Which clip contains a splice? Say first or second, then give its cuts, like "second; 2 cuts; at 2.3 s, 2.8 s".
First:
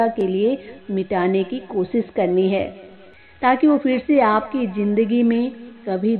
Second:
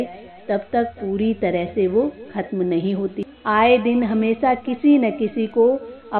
second; 1 cut; at 3.2 s